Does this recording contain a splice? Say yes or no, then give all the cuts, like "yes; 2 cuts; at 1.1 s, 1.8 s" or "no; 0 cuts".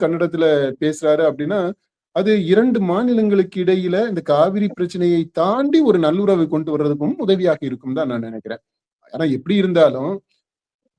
no; 0 cuts